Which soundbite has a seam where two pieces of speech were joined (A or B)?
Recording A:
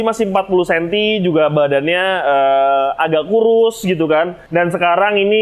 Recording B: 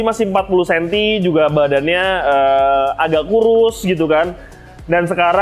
A